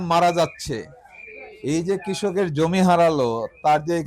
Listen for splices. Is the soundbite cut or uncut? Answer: uncut